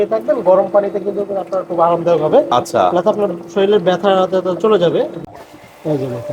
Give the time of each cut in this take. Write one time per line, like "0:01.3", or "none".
0:05.2